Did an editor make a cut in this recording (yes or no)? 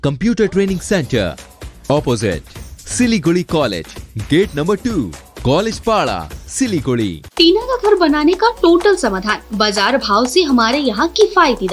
yes